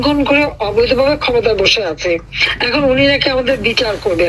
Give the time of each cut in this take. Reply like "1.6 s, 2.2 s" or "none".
none